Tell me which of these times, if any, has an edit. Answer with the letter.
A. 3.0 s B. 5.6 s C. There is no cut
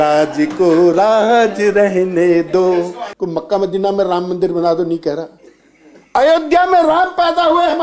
A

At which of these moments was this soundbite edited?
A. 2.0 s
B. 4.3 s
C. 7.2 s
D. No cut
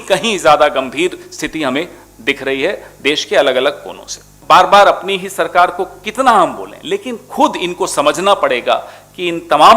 B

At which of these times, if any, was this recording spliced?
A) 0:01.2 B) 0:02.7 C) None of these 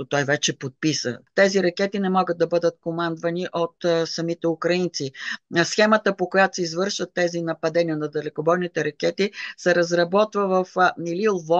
A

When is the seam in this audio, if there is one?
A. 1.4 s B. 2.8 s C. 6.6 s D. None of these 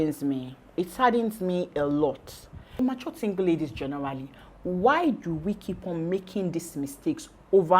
B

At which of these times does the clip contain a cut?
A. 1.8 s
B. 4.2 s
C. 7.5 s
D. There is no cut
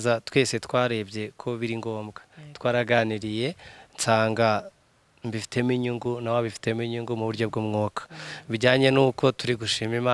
D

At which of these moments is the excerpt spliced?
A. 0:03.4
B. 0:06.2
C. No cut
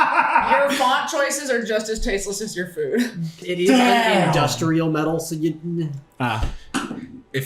A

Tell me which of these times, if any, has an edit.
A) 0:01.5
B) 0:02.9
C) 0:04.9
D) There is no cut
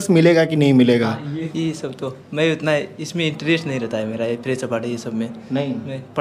A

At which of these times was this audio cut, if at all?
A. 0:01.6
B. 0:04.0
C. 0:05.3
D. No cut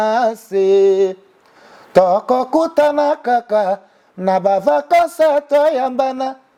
D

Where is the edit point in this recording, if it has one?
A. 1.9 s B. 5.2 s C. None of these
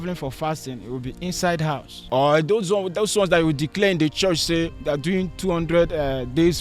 A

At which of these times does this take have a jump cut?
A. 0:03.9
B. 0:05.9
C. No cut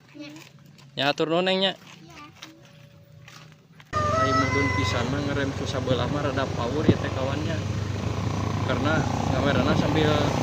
A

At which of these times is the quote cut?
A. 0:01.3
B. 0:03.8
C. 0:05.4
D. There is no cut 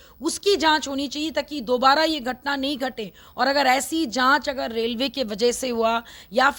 D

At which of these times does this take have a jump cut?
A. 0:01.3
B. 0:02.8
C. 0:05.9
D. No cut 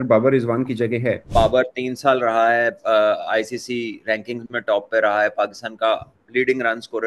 A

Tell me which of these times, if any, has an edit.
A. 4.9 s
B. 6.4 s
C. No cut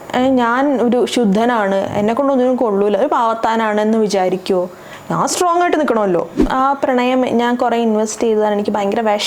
B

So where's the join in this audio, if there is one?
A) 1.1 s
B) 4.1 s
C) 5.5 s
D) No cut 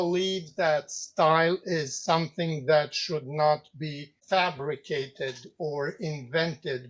B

